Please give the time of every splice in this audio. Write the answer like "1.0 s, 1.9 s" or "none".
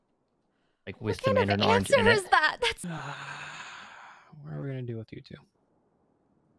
2.8 s